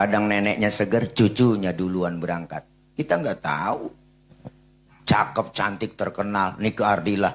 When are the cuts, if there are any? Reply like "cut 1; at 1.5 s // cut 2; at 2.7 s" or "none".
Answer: none